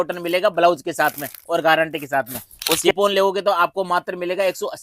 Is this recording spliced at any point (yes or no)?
yes